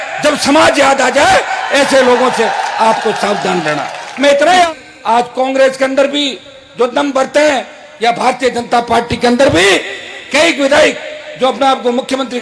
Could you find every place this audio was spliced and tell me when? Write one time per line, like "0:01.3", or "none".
0:04.7